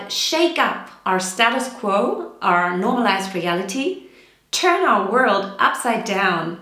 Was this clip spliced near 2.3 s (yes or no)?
no